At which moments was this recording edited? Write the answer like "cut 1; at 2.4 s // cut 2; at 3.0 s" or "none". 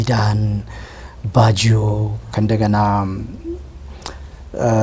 none